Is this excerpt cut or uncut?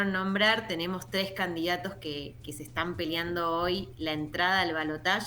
uncut